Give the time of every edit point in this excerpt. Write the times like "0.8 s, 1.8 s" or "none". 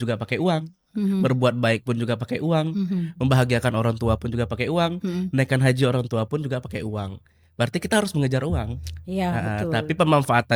none